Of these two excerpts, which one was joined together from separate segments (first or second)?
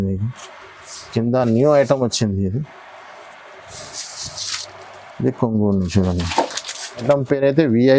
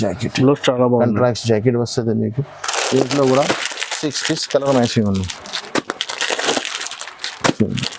first